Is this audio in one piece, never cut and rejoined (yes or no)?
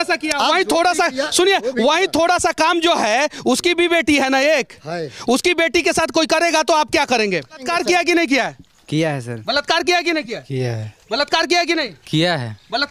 no